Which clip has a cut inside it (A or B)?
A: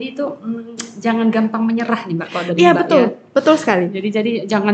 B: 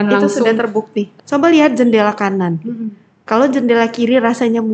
B